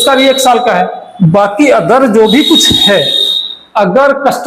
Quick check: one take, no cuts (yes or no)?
yes